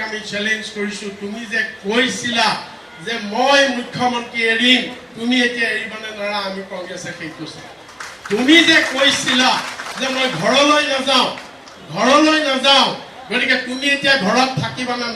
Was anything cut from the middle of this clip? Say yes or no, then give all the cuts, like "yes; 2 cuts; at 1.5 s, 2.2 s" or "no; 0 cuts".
no; 0 cuts